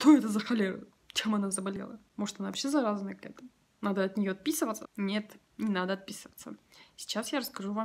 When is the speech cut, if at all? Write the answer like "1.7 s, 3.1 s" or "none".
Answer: 1.8 s, 4.9 s

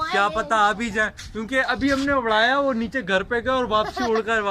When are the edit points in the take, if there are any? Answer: none

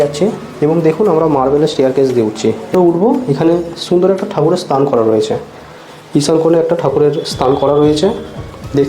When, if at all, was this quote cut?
2.7 s

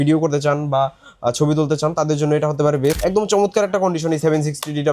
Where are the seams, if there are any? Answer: 3.0 s

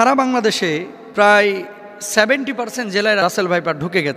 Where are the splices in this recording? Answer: 1.0 s, 3.2 s

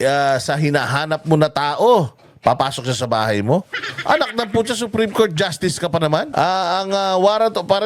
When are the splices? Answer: 6.3 s

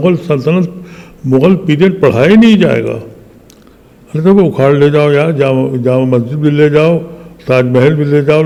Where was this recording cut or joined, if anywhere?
none

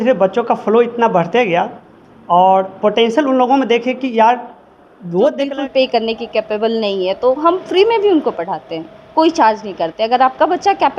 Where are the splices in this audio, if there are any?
5.5 s

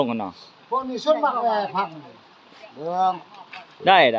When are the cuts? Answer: none

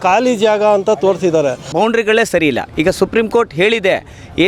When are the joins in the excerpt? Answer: 1.6 s

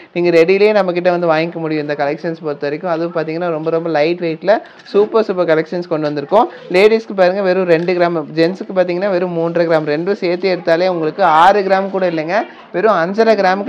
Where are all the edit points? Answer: none

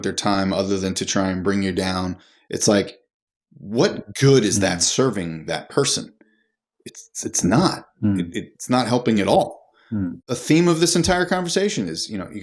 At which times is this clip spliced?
10.1 s

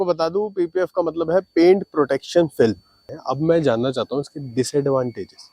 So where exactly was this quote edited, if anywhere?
3.1 s

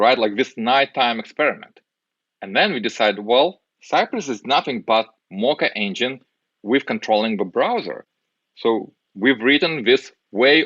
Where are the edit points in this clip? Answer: 3.7 s, 5.2 s, 9.0 s

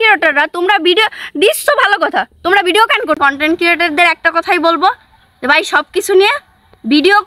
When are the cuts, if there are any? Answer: 3.2 s

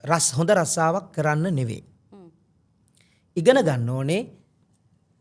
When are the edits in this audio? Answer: none

